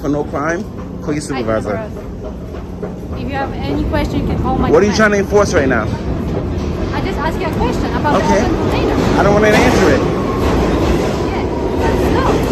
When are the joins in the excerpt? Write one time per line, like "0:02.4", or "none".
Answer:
none

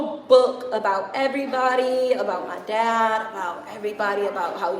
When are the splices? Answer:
none

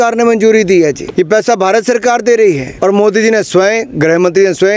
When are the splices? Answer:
0:01.0
0:02.7

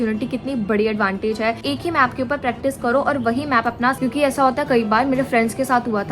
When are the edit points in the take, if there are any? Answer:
0:01.6
0:04.0

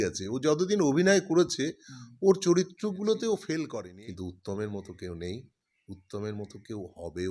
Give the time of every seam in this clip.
0:03.8

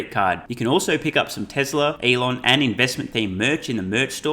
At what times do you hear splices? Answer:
0:02.0

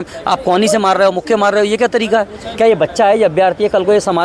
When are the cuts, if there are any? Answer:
none

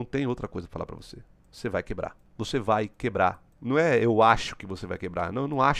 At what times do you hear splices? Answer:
0:02.2
0:03.5

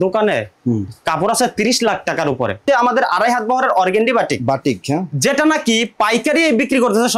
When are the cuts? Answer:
0:02.6

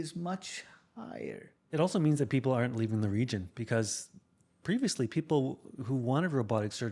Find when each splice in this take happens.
0:01.5

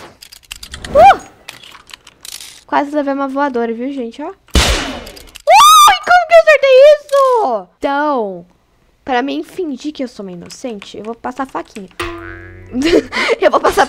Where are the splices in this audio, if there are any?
0:07.7

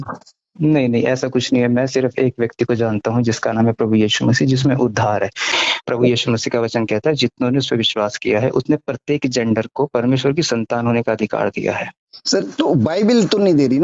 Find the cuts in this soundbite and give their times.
0:05.5

